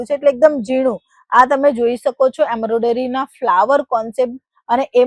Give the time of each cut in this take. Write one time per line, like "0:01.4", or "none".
none